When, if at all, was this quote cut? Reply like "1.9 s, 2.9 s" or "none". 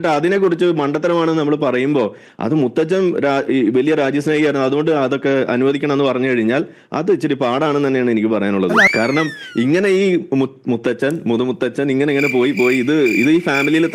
8.8 s